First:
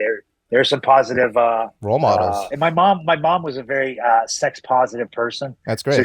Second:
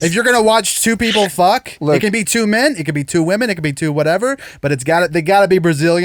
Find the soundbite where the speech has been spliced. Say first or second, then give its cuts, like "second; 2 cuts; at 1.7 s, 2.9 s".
first; 2 cuts; at 1.7 s, 2.5 s